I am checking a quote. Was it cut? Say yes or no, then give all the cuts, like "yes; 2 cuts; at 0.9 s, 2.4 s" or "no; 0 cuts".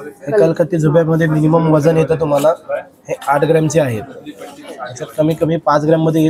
no; 0 cuts